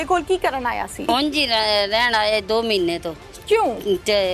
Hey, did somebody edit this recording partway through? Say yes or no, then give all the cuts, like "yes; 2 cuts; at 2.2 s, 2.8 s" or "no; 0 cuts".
yes; 1 cut; at 1.1 s